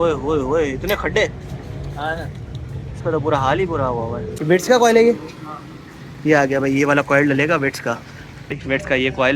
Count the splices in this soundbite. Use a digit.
2